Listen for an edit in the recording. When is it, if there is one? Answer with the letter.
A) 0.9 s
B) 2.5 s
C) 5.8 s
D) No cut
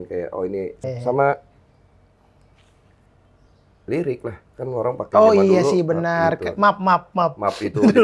A